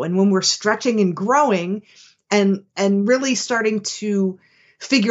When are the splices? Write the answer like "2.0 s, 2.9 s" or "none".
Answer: none